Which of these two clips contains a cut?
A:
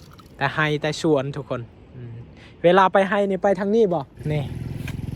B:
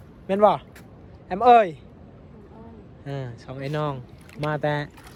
A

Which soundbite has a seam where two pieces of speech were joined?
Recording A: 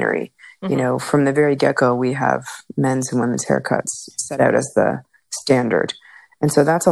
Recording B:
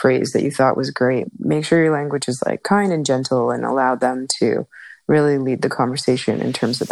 B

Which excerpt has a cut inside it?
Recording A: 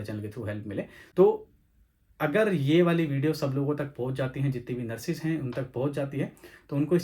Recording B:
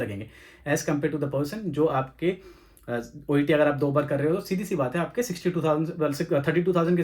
A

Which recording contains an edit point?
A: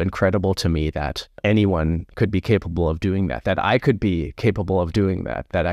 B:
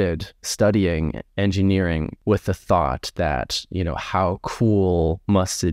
B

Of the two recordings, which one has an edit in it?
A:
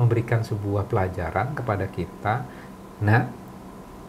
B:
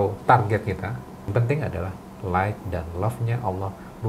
B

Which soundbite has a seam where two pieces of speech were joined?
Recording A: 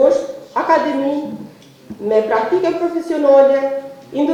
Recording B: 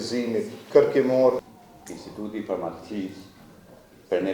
B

